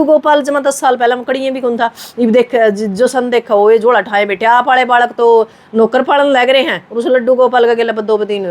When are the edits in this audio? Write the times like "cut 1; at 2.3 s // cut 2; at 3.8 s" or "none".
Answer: none